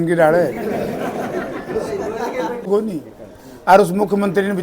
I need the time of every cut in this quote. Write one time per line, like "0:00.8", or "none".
0:02.6